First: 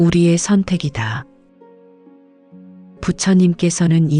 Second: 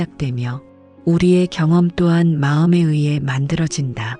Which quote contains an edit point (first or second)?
first